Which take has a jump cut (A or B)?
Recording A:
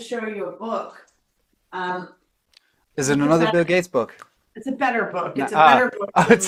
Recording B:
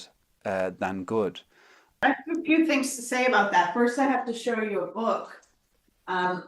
B